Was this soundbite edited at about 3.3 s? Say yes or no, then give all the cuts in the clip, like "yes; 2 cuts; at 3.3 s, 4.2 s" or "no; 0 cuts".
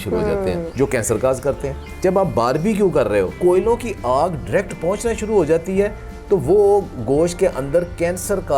yes; 2 cuts; at 1.9 s, 3.3 s